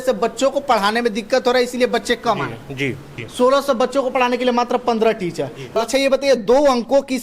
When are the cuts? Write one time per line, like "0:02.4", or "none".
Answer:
0:03.2
0:05.8